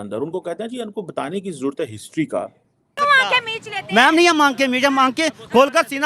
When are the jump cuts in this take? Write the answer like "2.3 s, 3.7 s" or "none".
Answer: 3.0 s